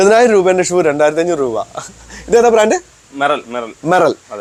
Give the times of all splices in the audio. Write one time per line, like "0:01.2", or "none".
none